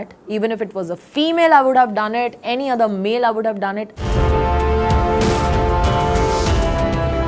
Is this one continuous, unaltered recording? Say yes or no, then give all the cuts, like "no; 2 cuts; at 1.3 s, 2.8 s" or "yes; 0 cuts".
no; 1 cut; at 3.9 s